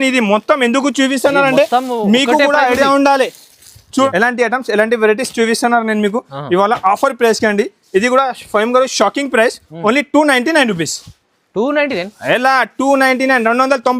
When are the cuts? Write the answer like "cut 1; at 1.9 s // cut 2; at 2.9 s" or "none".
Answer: cut 1; at 4.1 s